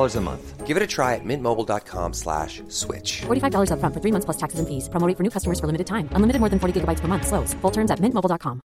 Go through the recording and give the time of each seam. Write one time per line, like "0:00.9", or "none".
none

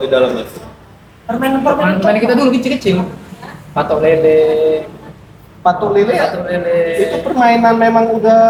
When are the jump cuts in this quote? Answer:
none

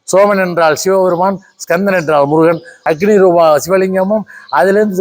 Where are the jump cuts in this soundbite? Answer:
0:02.7

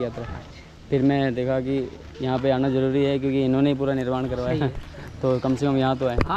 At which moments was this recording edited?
none

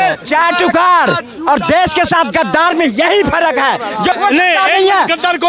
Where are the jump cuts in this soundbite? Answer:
0:04.2

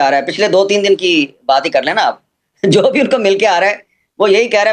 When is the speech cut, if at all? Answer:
none

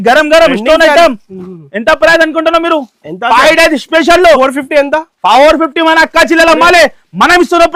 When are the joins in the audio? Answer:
none

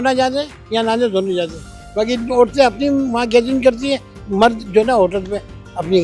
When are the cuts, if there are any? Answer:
none

